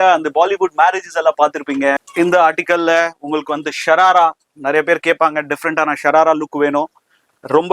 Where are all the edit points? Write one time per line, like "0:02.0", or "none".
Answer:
0:02.0